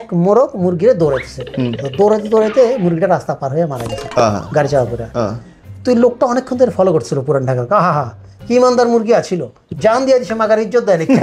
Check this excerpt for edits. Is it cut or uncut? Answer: uncut